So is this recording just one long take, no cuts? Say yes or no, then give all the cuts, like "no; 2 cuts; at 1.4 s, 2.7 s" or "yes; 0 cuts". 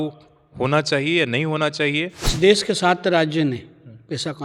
no; 1 cut; at 2.2 s